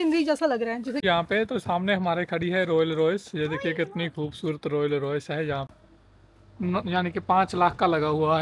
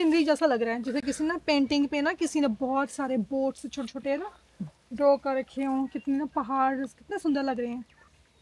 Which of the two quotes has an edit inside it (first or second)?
first